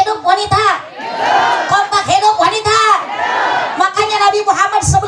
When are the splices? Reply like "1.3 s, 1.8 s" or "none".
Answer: none